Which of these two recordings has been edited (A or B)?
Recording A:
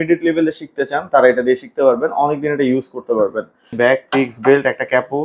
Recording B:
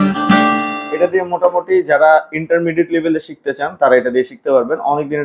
A